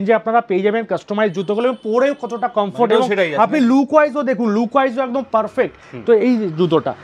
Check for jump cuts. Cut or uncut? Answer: uncut